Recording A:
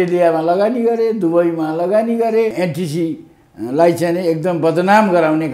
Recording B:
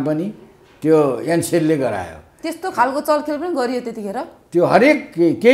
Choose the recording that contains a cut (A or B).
A